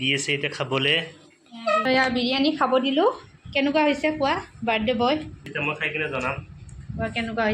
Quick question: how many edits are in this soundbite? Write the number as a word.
two